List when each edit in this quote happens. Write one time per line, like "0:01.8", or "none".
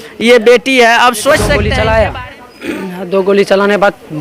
0:01.6